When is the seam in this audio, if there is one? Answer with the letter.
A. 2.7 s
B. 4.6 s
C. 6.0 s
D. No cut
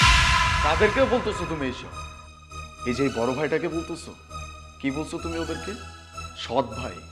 D